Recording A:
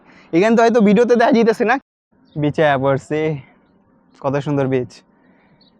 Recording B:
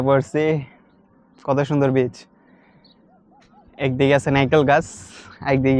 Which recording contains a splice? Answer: A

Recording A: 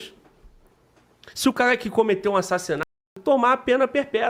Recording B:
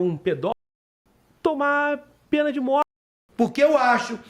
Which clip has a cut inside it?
B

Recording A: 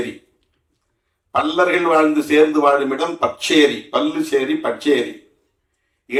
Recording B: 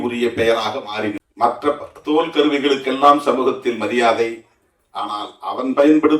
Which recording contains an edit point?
B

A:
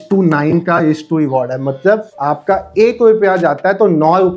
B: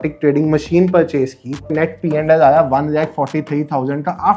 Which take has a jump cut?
B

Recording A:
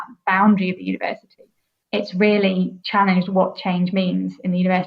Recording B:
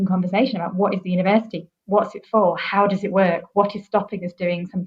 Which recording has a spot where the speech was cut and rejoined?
A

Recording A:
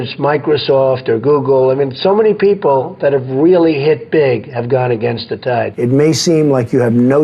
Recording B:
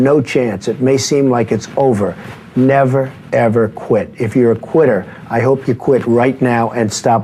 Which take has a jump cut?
A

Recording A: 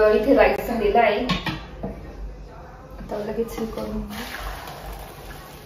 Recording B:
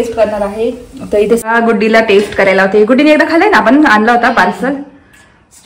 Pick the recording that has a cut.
B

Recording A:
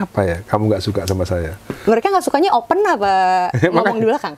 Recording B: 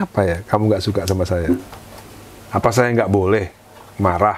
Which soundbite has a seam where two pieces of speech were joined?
B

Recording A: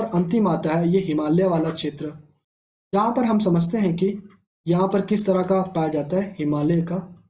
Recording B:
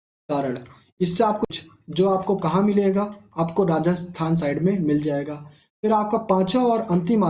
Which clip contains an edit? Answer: B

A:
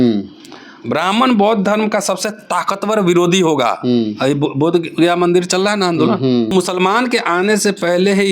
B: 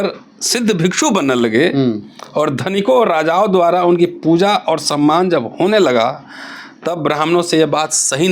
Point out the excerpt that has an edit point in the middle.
A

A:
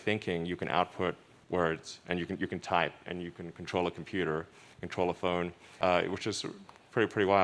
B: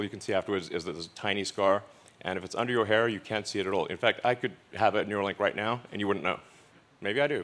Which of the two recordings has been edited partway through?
A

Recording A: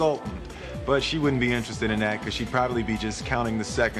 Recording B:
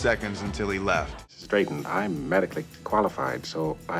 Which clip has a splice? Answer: B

